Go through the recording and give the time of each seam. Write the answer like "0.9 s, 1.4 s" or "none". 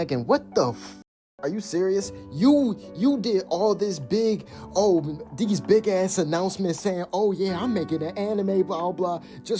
1.0 s

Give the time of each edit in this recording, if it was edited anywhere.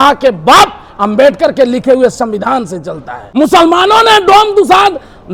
3.2 s

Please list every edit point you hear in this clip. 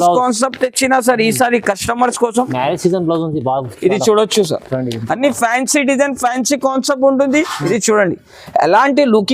7.6 s

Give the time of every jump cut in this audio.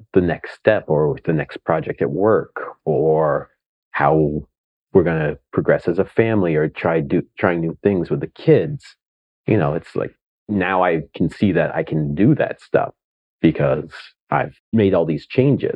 14.6 s

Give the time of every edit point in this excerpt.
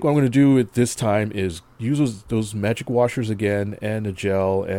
1.7 s

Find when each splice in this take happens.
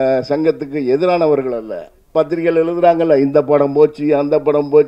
2.1 s

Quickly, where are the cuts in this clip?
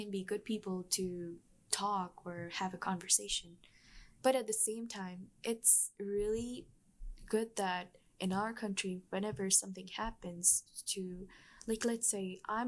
4.1 s

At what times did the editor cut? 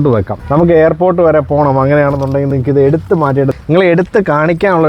3.5 s

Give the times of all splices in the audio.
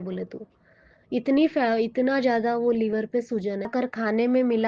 3.7 s

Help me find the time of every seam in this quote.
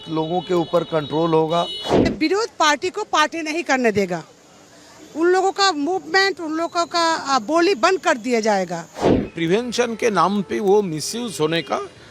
2.1 s, 9.3 s

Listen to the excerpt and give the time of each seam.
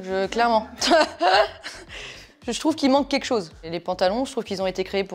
none

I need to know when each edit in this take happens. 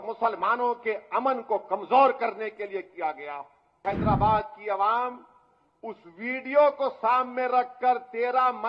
3.8 s

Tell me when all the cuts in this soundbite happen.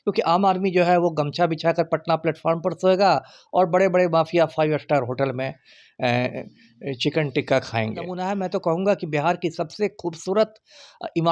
8.1 s

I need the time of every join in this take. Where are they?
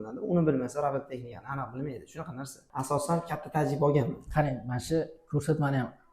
2.6 s

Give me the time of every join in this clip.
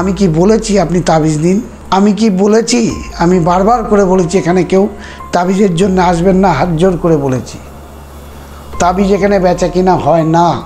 1.7 s

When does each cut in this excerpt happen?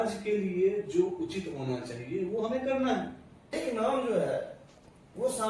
3.5 s

